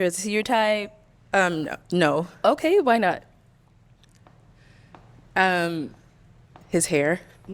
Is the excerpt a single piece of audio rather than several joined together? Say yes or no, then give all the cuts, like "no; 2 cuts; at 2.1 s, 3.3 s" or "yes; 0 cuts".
yes; 0 cuts